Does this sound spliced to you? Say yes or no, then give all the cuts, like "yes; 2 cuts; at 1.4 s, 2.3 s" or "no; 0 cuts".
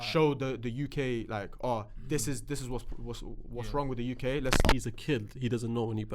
yes; 1 cut; at 4.6 s